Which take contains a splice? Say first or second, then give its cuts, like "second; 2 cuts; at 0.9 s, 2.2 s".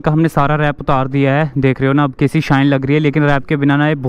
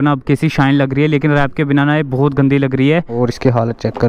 second; 1 cut; at 3.1 s